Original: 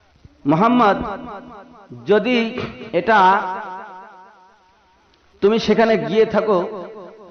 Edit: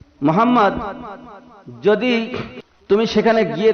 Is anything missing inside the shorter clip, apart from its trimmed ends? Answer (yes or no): yes